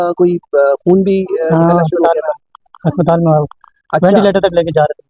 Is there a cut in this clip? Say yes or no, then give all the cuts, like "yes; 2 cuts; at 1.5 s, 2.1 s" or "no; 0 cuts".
no; 0 cuts